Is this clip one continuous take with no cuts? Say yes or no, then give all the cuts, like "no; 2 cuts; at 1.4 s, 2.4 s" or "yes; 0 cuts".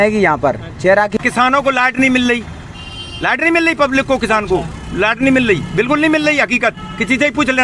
no; 1 cut; at 1.2 s